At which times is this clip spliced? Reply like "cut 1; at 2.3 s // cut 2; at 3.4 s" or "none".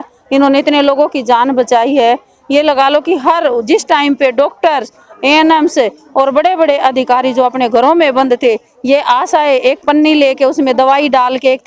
none